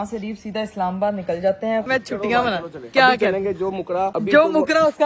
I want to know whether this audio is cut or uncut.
cut